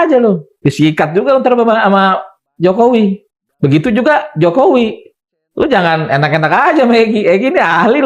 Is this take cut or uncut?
cut